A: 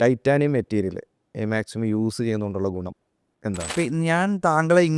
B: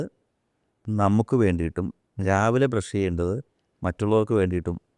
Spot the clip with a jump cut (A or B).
A